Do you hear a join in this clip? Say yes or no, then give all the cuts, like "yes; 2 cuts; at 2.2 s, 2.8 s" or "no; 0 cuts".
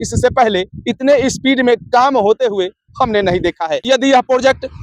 yes; 1 cut; at 3.8 s